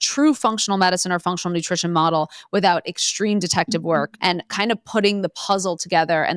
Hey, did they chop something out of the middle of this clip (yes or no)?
yes